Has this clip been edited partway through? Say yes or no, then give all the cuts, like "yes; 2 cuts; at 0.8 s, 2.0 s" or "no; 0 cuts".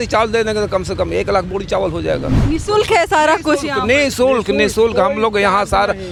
no; 0 cuts